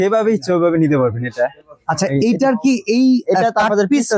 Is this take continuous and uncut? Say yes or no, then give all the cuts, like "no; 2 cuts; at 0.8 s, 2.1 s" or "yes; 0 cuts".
yes; 0 cuts